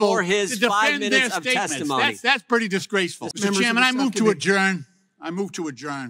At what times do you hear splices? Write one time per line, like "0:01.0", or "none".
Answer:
0:03.2